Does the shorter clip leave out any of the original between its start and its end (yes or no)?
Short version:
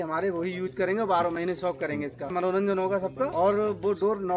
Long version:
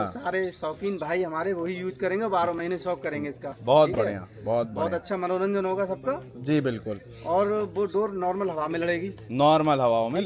yes